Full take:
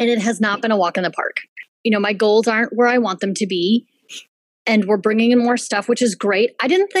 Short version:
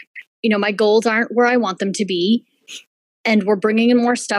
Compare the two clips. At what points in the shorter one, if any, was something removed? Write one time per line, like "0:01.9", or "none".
none